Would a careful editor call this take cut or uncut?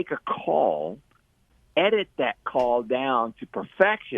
cut